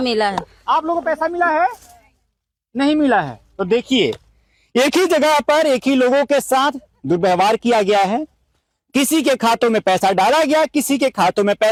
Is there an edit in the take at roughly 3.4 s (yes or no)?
no